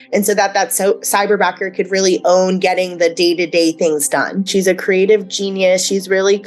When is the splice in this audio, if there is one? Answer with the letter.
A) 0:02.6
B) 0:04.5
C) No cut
B